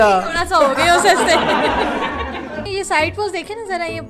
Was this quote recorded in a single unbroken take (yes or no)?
no